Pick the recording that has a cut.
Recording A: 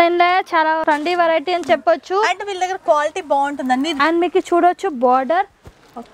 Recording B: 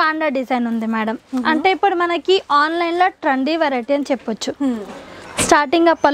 A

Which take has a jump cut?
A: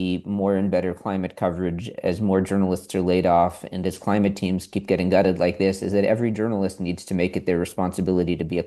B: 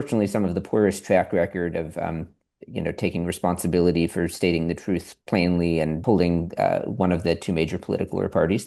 B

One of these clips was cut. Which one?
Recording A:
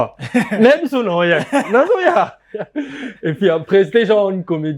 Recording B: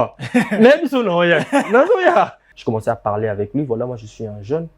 B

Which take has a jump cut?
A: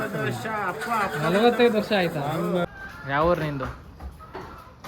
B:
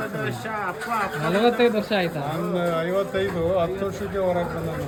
A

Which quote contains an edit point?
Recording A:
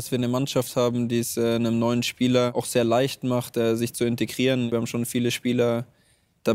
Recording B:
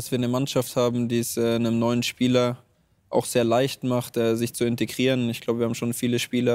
A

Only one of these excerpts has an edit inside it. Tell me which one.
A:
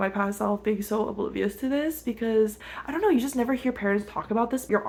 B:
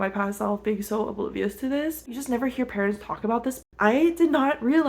B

